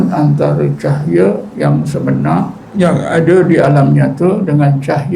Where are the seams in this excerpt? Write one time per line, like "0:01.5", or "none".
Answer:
0:01.5
0:02.6